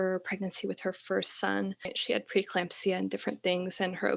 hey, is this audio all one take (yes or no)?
no